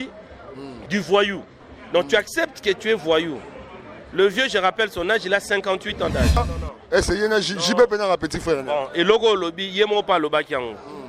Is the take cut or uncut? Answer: cut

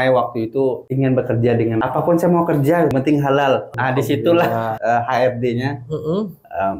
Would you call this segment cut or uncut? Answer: cut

